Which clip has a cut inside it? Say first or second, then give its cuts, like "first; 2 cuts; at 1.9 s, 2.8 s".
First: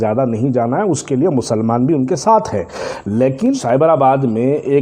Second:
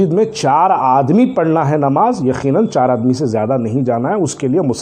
first; 1 cut; at 3.6 s